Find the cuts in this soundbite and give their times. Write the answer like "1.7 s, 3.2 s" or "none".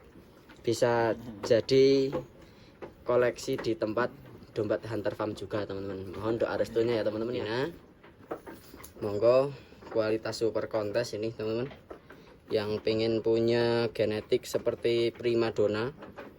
7.4 s

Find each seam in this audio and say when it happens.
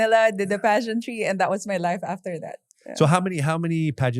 none

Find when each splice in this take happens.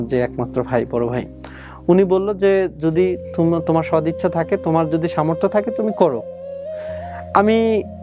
none

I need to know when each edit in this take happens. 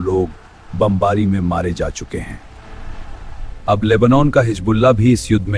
none

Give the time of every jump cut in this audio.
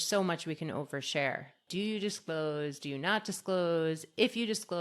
1.6 s

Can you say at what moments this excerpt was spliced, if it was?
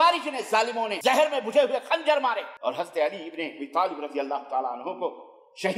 0.9 s, 2.5 s

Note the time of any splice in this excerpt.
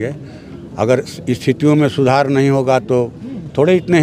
none

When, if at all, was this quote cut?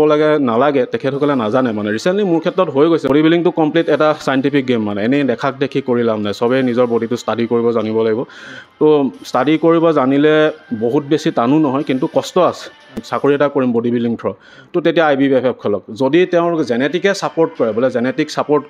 3.1 s, 13.0 s

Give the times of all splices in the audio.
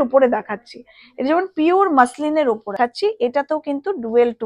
2.8 s

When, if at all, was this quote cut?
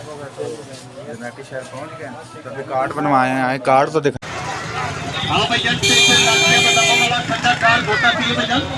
4.1 s

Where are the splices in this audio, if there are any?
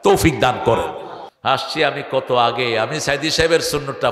1.4 s

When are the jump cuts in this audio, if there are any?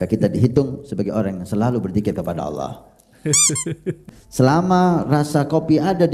4.0 s

